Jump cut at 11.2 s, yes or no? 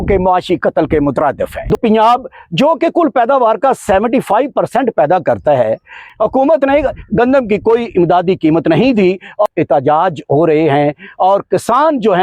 no